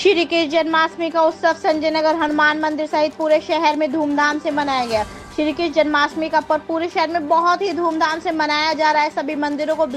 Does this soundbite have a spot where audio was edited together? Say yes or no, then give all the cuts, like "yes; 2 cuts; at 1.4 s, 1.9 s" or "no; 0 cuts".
no; 0 cuts